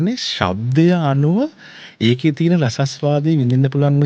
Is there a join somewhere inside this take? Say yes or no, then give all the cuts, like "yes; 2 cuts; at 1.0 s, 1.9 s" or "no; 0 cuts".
no; 0 cuts